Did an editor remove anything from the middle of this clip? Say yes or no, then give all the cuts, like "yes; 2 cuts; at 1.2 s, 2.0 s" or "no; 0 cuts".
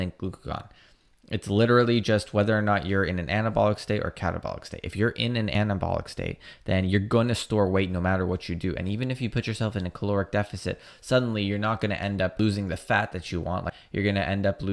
yes; 3 cuts; at 5.5 s, 12.4 s, 13.8 s